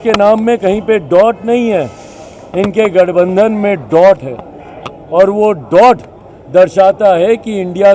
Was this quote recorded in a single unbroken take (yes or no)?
yes